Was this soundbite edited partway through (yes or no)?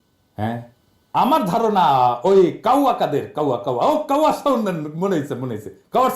yes